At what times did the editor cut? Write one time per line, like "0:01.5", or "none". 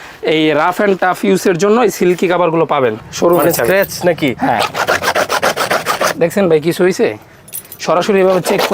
0:03.0